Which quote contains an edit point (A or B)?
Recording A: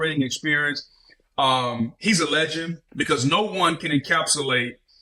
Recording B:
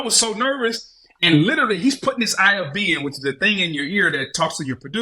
A